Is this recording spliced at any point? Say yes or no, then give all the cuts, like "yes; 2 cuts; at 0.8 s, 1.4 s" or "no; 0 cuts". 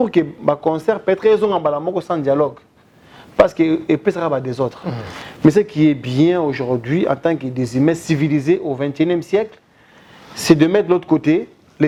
no; 0 cuts